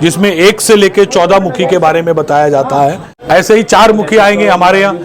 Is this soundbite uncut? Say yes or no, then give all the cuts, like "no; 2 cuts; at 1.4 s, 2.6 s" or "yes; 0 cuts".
no; 1 cut; at 3.1 s